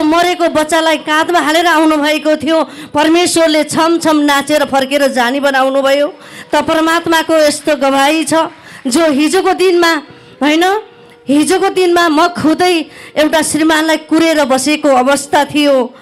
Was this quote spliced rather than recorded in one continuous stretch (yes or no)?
no